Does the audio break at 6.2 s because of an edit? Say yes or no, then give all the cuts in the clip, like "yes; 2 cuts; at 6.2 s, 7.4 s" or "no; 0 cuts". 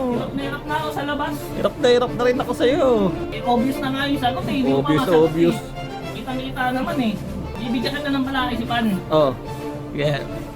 no; 2 cuts; at 3.3 s, 7.5 s